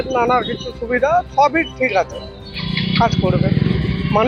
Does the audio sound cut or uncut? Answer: uncut